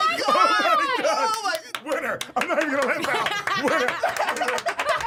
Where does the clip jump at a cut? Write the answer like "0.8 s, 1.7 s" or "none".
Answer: none